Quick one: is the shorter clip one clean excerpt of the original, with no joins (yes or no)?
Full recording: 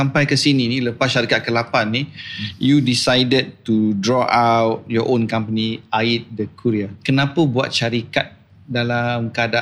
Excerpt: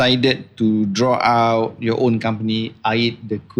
yes